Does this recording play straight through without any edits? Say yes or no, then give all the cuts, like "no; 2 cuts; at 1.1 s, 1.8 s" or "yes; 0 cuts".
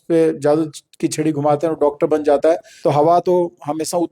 no; 1 cut; at 2.7 s